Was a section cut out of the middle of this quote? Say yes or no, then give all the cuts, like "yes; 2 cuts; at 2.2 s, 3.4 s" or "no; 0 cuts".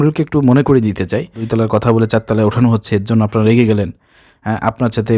yes; 1 cut; at 1.4 s